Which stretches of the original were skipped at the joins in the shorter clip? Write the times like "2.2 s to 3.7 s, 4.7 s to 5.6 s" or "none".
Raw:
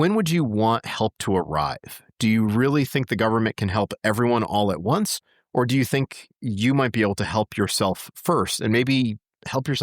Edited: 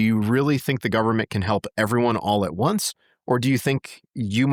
none